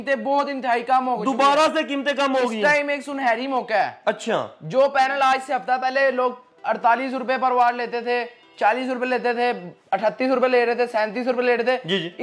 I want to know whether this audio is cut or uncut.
uncut